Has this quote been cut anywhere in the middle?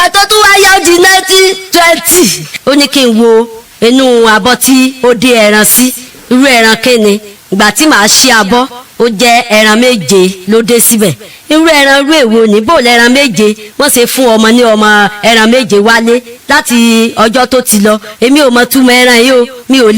yes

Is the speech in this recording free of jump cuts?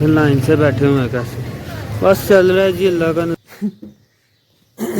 no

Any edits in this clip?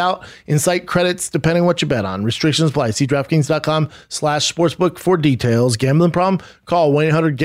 no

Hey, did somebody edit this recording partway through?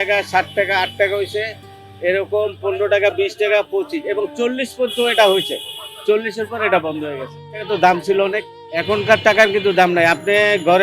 no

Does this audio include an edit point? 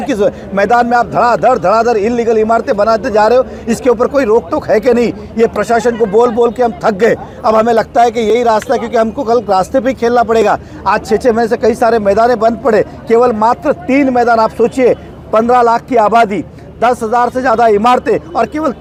no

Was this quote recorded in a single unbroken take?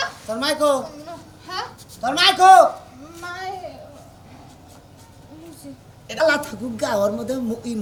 yes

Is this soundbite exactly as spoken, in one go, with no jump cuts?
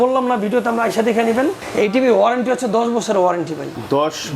no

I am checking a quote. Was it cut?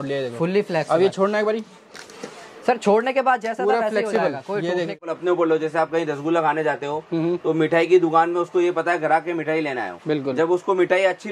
yes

